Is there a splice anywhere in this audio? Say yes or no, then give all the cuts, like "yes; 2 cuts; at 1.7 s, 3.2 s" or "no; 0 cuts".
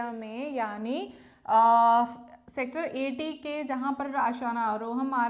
no; 0 cuts